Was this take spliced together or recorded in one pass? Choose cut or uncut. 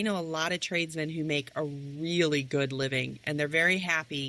uncut